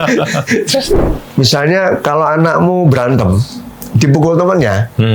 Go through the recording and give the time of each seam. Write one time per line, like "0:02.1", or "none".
0:01.0